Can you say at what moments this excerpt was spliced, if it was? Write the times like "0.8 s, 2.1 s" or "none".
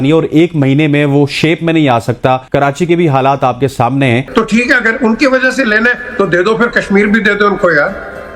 4.2 s